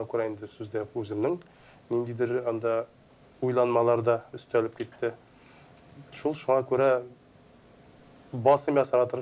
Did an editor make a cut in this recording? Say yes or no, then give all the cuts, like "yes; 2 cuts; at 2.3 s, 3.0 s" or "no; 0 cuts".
no; 0 cuts